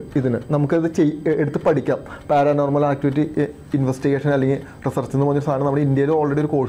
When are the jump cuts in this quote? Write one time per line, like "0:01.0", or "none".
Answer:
none